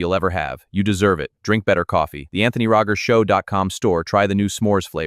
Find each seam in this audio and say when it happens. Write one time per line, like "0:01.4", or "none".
0:01.1